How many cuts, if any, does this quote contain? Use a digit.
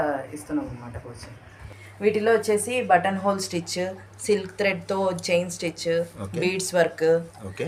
1